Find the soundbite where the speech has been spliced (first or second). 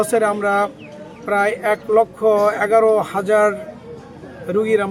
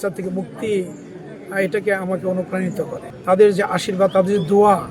second